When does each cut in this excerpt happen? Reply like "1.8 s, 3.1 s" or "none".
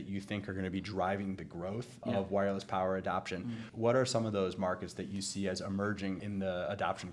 2.0 s, 6.2 s